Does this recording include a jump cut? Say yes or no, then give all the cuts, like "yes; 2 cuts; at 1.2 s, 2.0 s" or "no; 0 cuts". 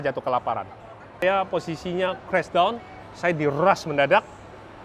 yes; 1 cut; at 1.2 s